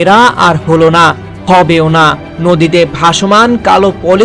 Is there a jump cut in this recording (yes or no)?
no